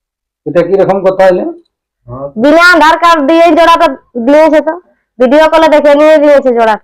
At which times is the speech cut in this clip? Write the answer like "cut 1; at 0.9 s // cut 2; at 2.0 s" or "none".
cut 1; at 5.0 s